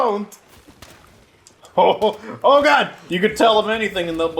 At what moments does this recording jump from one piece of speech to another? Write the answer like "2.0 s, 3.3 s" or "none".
3.0 s

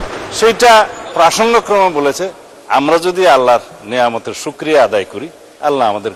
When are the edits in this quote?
none

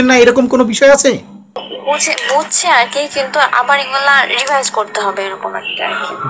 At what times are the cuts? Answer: none

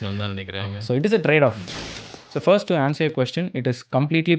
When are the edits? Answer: 1.8 s

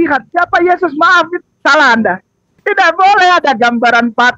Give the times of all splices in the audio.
2.6 s

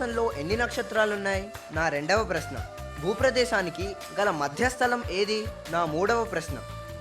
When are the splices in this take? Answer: 1.6 s, 5.6 s

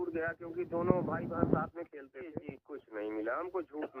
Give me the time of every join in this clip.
2.2 s

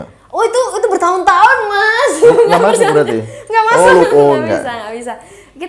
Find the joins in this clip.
none

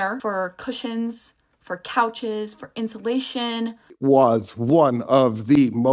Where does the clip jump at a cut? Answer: 3.9 s

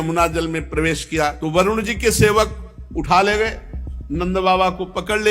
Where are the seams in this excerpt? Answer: 1.4 s

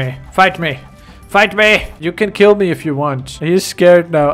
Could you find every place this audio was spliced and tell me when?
2.0 s

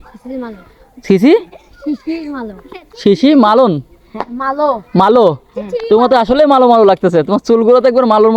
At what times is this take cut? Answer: none

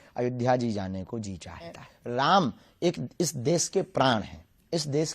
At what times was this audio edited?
1.9 s

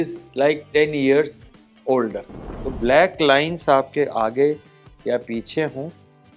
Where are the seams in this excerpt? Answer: 2.6 s

